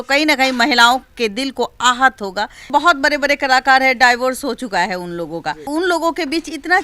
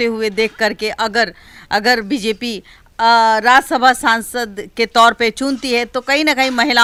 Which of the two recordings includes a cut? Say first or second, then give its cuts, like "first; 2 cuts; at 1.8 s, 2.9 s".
first; 2 cuts; at 2.7 s, 5.6 s